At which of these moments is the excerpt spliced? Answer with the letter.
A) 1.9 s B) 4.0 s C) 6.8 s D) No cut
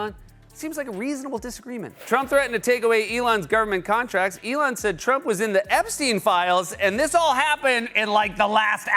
A